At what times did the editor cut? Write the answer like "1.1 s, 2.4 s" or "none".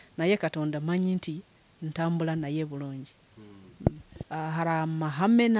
4.1 s